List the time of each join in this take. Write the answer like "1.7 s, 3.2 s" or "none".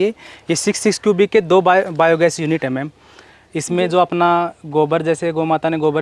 none